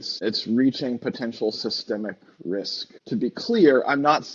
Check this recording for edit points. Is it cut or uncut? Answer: cut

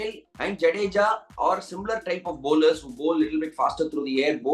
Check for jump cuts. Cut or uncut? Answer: uncut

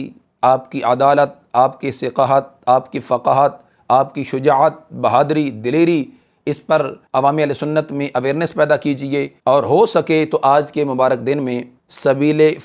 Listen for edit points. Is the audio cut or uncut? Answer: uncut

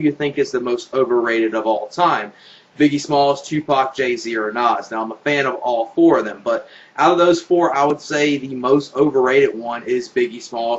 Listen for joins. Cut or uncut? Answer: uncut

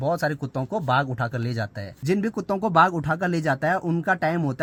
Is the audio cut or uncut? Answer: uncut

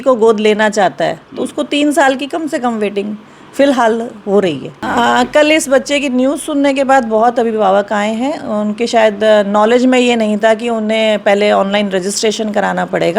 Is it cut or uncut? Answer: cut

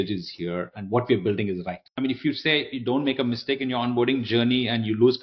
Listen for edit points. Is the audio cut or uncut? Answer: cut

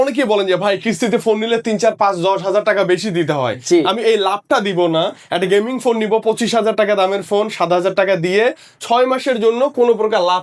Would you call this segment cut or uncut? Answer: uncut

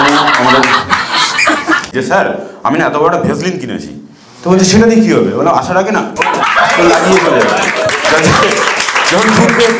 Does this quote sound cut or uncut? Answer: cut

